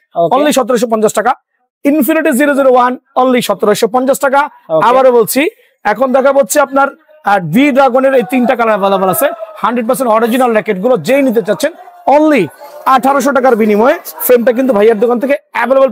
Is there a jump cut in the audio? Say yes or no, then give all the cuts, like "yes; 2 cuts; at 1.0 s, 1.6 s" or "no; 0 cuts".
no; 0 cuts